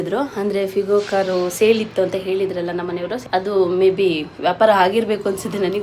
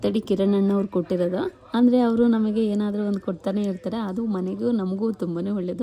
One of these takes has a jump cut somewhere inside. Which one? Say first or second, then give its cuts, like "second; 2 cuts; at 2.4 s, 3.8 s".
first; 1 cut; at 3.2 s